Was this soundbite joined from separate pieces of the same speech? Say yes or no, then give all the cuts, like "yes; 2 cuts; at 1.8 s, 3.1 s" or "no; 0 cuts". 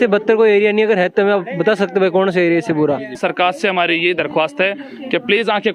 yes; 1 cut; at 3.1 s